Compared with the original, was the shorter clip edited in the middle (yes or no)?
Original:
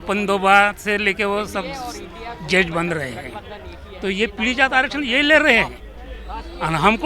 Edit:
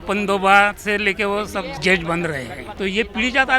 yes